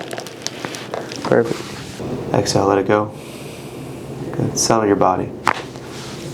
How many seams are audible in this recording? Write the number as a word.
one